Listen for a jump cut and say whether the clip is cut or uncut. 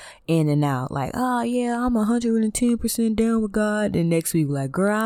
uncut